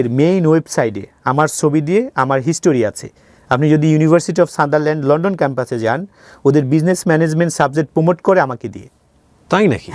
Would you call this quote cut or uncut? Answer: uncut